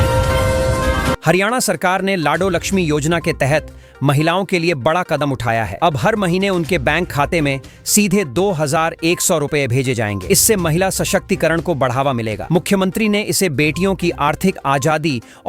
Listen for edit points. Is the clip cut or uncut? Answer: cut